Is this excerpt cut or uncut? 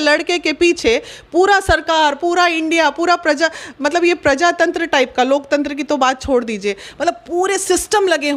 uncut